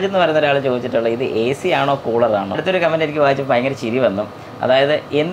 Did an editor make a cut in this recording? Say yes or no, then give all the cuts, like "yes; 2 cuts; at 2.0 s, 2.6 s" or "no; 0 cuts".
yes; 1 cut; at 2.6 s